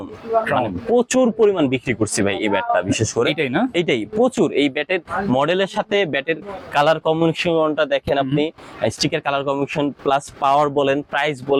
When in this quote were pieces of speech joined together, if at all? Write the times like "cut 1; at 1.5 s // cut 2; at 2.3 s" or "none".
none